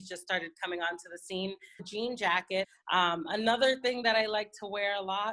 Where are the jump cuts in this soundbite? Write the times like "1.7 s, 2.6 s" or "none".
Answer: 1.9 s, 2.8 s